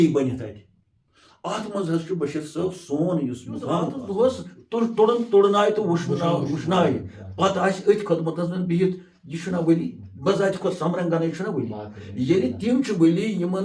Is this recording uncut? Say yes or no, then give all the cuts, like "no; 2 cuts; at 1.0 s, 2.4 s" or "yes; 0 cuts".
no; 1 cut; at 4.0 s